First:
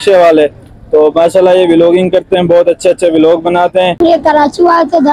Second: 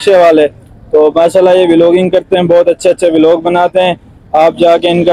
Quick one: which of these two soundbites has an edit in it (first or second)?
first